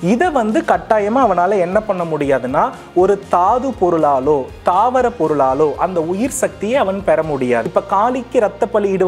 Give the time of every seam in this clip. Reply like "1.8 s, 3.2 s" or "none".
7.7 s